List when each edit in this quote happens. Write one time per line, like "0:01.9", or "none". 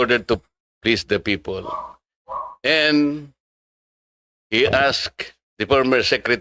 none